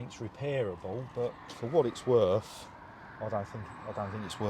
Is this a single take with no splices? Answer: yes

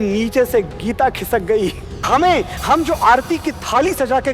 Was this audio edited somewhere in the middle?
yes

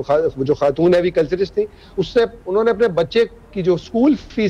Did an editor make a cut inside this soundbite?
no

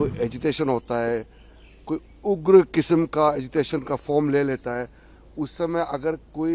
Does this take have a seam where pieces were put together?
no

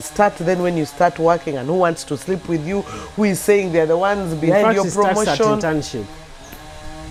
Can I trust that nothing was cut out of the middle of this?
yes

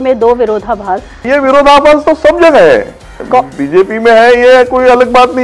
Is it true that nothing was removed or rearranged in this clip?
no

